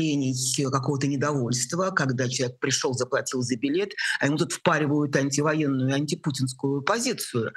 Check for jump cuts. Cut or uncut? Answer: uncut